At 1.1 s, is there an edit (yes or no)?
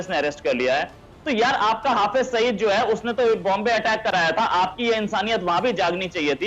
yes